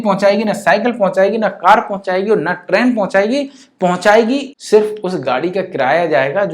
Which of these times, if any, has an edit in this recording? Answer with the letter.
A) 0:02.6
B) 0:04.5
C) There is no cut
B